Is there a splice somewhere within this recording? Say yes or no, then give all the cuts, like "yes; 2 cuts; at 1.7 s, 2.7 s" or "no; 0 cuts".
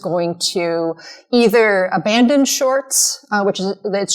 no; 0 cuts